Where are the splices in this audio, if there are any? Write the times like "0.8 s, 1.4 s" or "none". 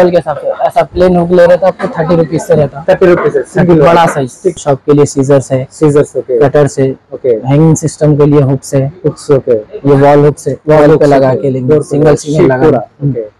4.6 s